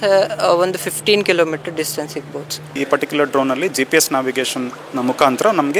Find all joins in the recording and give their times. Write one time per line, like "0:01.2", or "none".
0:02.8